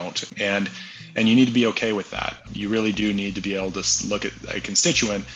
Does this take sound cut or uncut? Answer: cut